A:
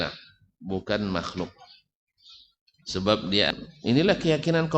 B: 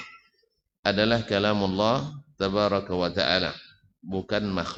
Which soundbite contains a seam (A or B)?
A